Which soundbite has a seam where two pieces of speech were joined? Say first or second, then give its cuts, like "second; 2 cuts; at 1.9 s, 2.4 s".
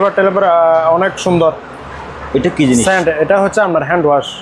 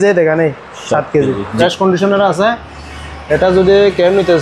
second; 1 cut; at 1.5 s